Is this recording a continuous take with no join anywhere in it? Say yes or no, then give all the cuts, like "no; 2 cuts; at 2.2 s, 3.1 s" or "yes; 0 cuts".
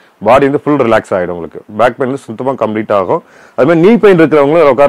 yes; 0 cuts